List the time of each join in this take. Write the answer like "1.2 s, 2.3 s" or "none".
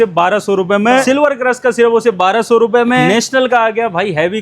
1.0 s, 3.0 s